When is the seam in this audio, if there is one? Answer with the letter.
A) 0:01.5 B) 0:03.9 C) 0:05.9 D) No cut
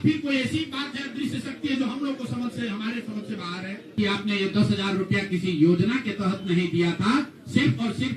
B